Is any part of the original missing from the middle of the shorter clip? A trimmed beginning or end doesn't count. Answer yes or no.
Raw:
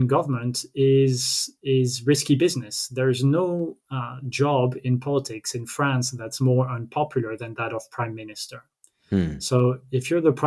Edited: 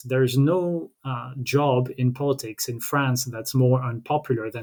no